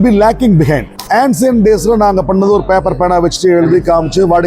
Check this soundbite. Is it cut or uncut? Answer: cut